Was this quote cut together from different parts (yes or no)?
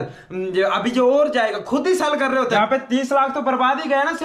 yes